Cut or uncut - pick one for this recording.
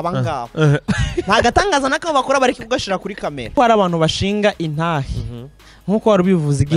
cut